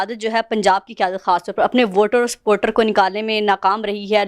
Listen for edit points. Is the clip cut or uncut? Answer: uncut